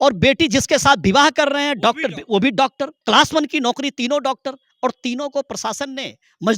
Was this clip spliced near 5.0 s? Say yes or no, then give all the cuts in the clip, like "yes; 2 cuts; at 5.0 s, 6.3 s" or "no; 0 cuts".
no; 1 cut; at 3.0 s